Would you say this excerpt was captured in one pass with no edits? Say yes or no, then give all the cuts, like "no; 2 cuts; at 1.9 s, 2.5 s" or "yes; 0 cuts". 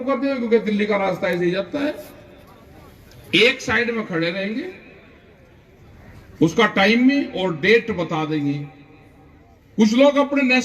yes; 0 cuts